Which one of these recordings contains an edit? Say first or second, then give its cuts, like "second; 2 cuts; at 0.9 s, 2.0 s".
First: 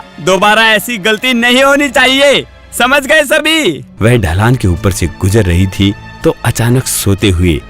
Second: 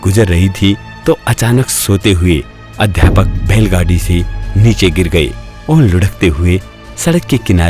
first; 1 cut; at 3.9 s